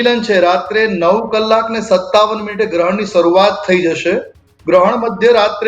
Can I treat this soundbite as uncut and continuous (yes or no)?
yes